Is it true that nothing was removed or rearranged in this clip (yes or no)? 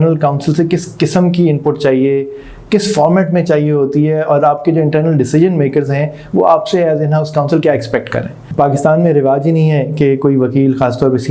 no